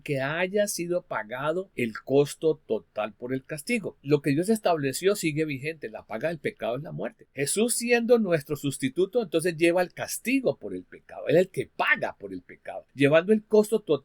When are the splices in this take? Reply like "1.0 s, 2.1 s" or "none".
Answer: 1.7 s, 3.9 s, 7.2 s, 12.8 s